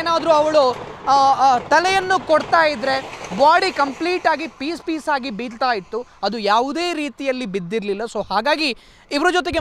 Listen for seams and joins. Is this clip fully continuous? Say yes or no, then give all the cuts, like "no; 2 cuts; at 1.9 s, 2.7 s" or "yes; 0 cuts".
yes; 0 cuts